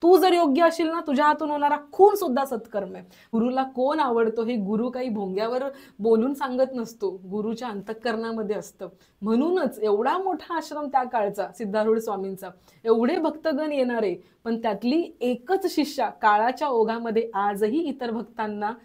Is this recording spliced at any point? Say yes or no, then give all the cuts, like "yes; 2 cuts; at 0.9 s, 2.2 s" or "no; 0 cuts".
yes; 1 cut; at 3.3 s